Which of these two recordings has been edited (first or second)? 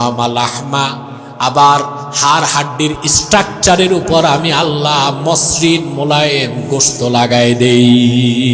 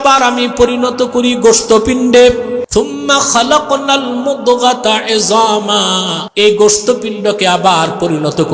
second